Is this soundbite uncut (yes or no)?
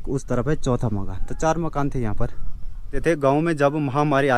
no